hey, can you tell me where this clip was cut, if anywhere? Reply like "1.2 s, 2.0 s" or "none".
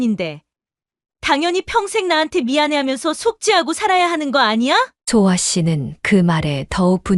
none